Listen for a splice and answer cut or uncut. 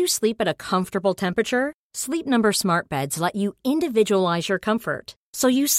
uncut